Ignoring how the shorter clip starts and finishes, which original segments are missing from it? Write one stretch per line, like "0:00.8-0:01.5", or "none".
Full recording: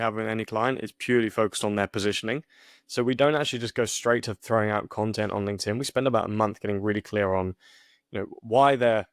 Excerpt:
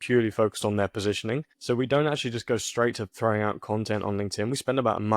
0:02.5-0:02.8